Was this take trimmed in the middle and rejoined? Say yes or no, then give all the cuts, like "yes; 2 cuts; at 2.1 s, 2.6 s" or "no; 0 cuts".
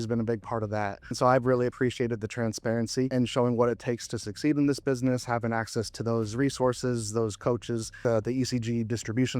yes; 3 cuts; at 1.1 s, 3.1 s, 8.0 s